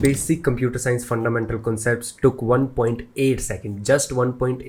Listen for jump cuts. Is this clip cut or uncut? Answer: uncut